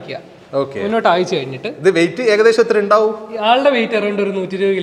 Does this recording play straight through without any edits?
yes; 0 cuts

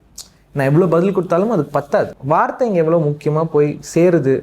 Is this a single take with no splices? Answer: no; 1 cut; at 2.2 s

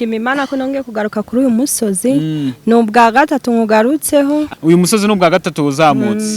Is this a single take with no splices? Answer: no; 1 cut; at 4.5 s

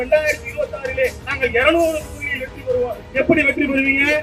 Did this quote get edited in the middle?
no; 0 cuts

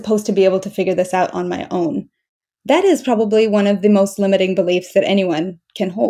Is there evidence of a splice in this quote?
no; 0 cuts

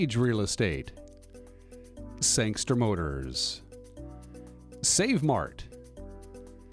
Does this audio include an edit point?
no; 0 cuts

